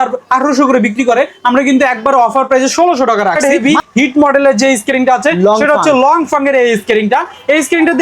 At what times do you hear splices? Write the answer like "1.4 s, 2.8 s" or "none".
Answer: 3.4 s